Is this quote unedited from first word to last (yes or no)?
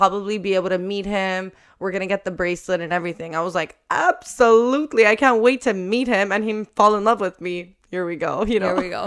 yes